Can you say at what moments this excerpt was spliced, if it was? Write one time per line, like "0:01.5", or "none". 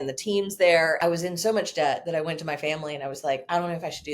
0:01.0